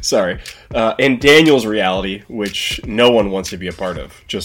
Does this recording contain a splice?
no; 0 cuts

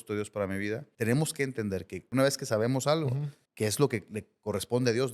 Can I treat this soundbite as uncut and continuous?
no; 3 cuts; at 0.9 s, 2.1 s, 3.4 s

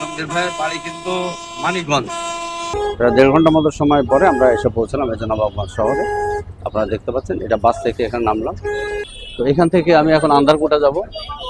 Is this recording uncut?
no; 2 cuts; at 2.7 s, 9.1 s

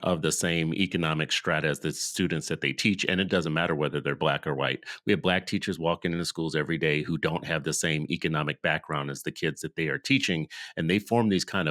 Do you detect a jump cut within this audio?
no; 0 cuts

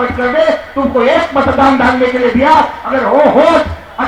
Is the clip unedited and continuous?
yes; 0 cuts

